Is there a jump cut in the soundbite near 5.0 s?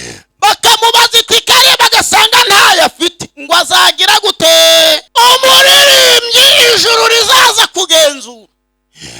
yes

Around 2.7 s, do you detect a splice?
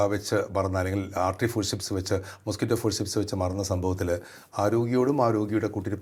no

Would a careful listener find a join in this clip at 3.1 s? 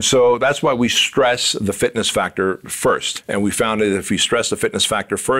yes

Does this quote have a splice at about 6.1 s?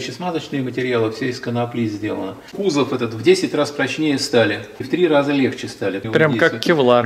yes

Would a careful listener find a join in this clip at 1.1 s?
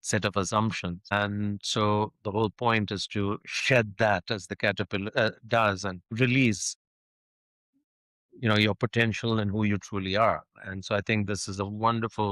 yes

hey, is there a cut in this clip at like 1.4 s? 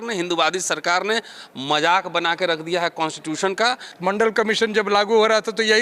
no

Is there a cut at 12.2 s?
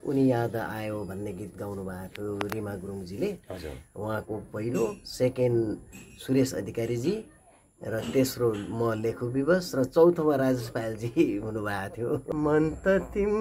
yes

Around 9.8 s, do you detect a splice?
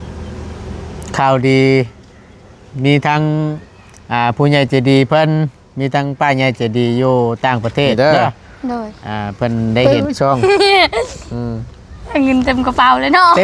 yes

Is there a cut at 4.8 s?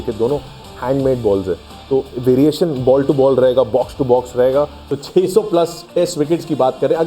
yes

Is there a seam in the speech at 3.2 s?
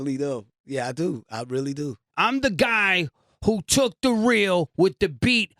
no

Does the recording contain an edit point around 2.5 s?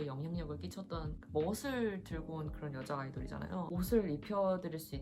no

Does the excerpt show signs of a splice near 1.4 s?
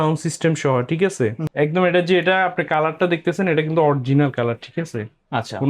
yes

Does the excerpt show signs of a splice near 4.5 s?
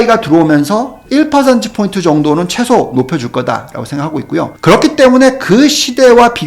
yes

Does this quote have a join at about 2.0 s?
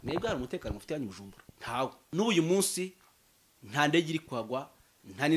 yes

